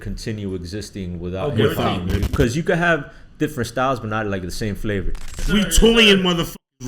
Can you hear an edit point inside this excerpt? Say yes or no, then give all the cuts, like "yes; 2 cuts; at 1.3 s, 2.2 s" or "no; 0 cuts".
yes; 2 cuts; at 2.3 s, 5.4 s